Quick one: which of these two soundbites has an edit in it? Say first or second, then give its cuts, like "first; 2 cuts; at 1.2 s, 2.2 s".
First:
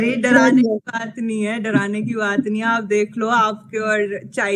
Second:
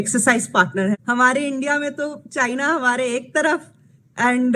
second; 1 cut; at 1.0 s